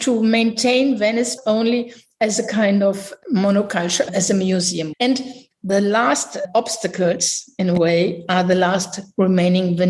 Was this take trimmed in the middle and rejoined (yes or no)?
yes